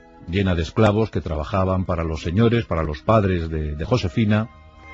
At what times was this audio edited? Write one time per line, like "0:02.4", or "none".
none